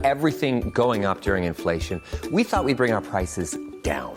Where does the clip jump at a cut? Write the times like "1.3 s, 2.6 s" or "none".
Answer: none